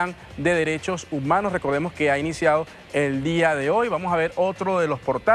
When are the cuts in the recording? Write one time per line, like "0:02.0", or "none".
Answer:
none